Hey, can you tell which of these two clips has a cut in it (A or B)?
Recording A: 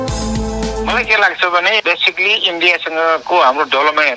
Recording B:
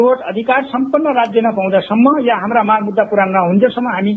A